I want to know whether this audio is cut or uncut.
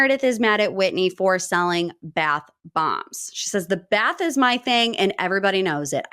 uncut